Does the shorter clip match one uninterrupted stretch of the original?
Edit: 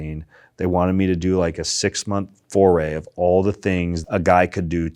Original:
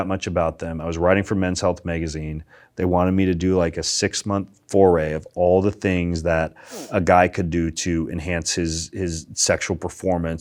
no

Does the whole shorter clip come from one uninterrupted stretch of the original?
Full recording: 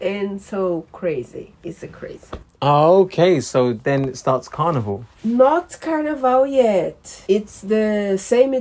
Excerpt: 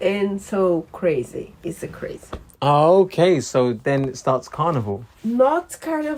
yes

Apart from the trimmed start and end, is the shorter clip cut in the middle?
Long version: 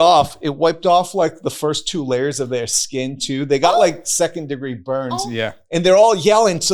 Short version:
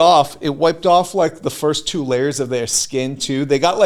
no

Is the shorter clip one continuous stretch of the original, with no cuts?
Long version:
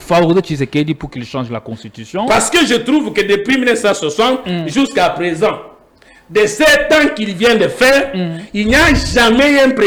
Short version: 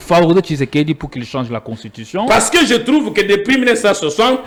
yes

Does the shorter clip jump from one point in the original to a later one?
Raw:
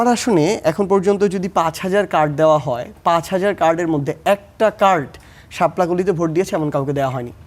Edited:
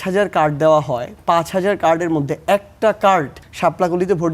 yes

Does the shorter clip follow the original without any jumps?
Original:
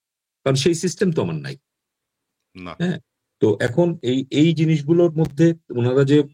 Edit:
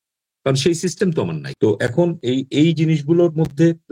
no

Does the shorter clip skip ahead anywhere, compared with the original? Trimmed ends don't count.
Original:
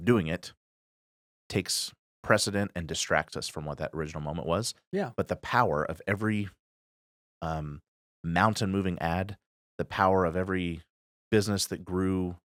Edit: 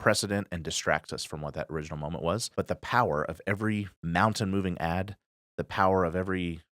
yes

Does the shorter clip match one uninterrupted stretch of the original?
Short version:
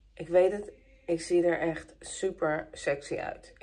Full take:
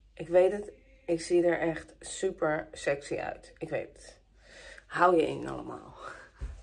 yes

